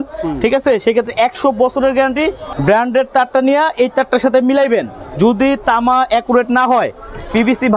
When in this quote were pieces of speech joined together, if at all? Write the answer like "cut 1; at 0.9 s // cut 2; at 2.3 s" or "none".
cut 1; at 2.5 s